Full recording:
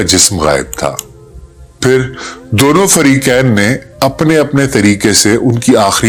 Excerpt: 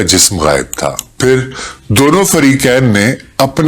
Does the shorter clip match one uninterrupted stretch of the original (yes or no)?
no